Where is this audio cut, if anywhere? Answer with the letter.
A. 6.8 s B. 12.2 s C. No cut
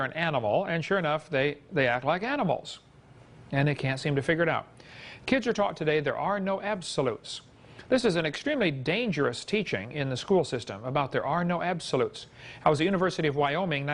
C